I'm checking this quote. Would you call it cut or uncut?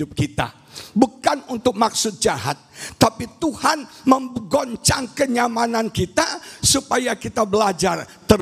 uncut